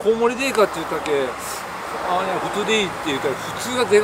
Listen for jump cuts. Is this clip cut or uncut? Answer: uncut